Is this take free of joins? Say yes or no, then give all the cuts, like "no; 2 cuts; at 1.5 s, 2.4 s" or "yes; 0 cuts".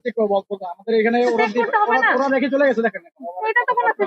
yes; 0 cuts